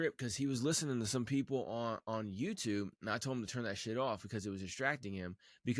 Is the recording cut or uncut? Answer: uncut